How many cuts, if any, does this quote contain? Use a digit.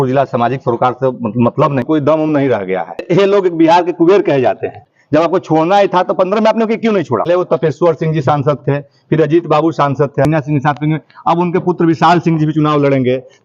5